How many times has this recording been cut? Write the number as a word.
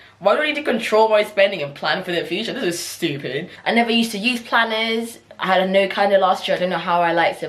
one